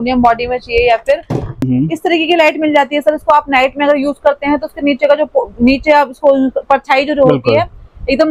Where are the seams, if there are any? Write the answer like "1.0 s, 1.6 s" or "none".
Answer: 1.6 s